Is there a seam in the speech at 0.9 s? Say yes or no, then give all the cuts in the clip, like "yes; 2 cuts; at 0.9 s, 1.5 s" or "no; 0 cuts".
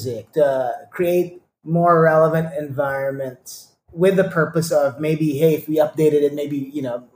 no; 0 cuts